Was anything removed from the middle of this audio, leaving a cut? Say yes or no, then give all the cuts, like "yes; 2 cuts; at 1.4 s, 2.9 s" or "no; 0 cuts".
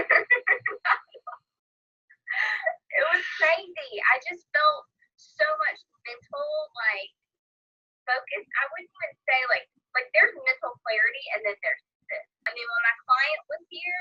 yes; 1 cut; at 12.5 s